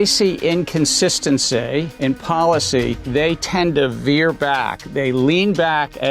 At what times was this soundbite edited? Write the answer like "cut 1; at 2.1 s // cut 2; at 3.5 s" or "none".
cut 1; at 1.9 s // cut 2; at 3.0 s // cut 3; at 4.8 s